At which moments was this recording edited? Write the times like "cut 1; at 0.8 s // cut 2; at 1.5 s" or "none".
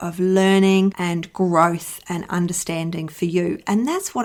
none